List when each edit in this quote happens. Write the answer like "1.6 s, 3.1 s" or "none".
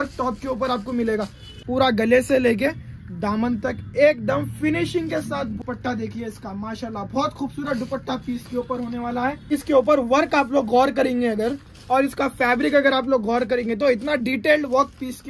1.5 s, 5.6 s, 9.5 s